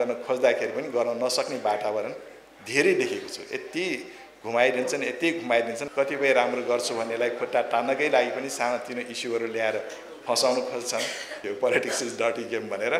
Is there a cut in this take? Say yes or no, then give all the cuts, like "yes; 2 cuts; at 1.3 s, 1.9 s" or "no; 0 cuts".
yes; 2 cuts; at 5.8 s, 11.4 s